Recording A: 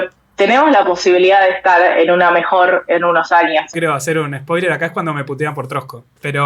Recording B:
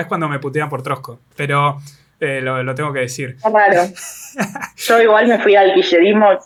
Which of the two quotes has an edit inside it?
A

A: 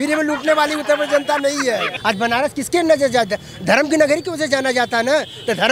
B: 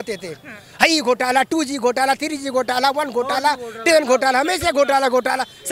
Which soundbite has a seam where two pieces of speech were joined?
A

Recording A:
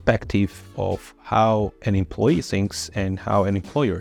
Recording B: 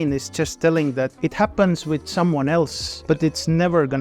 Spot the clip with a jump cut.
B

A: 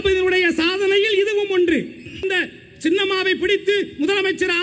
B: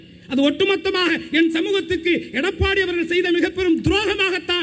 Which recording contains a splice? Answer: A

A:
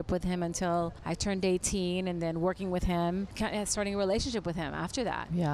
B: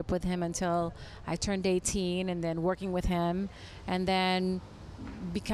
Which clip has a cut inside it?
A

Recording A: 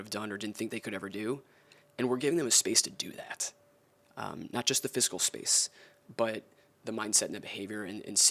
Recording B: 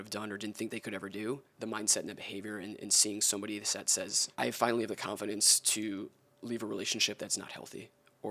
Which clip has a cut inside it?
B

